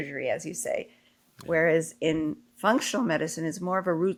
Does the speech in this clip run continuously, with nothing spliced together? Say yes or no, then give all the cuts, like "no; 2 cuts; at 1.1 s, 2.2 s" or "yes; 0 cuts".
yes; 0 cuts